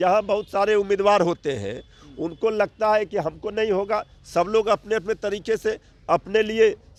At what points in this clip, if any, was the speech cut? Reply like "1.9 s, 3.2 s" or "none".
none